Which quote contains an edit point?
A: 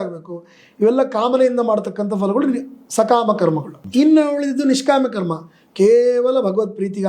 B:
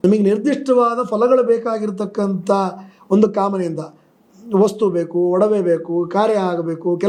A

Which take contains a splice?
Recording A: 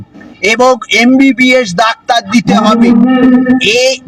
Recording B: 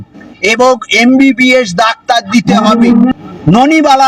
B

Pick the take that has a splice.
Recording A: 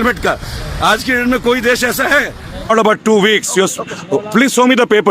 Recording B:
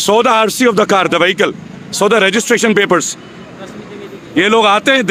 A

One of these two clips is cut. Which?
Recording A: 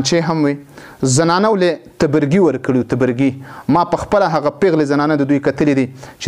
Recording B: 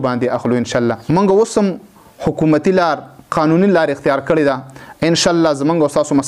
B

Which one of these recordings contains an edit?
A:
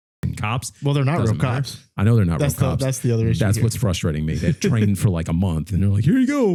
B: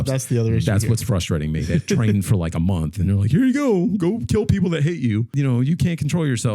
B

